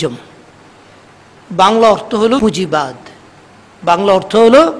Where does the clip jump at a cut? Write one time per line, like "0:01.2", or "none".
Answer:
0:02.4